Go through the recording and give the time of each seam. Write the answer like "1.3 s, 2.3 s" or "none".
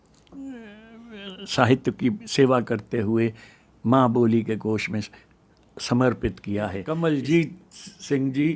6.8 s